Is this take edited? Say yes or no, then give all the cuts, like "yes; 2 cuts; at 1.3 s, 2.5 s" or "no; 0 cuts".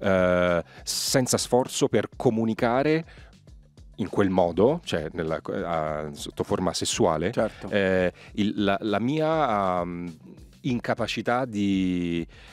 no; 0 cuts